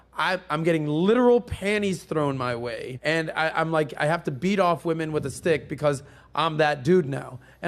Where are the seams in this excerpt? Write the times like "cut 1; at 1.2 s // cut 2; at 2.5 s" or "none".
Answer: cut 1; at 2.9 s